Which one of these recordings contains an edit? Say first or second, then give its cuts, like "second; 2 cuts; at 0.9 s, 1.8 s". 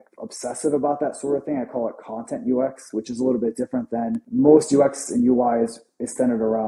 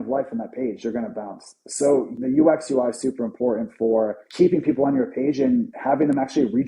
second; 2 cuts; at 2.2 s, 4.2 s